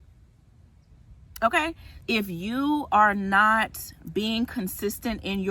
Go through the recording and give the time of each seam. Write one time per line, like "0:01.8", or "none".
0:01.9